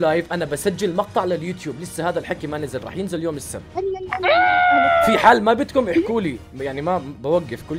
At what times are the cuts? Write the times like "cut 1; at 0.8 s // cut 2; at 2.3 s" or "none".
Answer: none